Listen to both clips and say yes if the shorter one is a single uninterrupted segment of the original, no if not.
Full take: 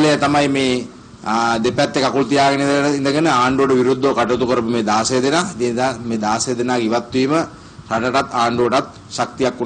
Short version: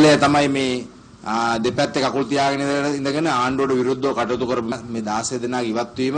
no